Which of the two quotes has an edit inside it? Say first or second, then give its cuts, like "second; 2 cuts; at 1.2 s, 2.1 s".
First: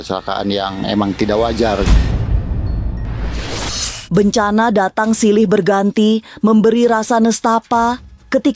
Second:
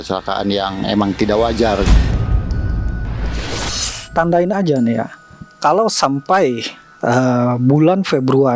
second; 1 cut; at 4.0 s